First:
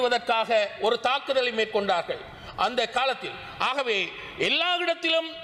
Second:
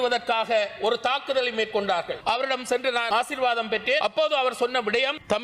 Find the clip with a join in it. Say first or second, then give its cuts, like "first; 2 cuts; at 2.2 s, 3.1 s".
second; 3 cuts; at 2.1 s, 3.1 s, 4.0 s